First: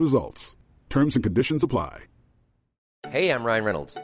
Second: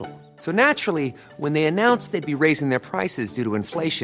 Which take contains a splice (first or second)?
first